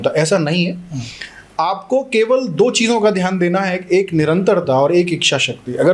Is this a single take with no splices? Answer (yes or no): yes